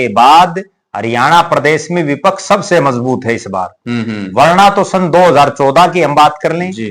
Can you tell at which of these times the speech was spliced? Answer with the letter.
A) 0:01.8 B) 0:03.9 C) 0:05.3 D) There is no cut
D